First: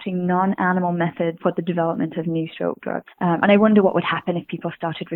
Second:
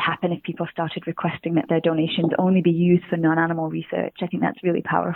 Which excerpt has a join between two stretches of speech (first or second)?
first